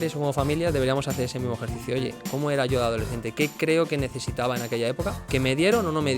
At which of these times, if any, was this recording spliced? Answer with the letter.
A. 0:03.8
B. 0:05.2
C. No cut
B